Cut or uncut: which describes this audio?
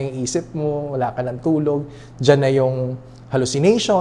uncut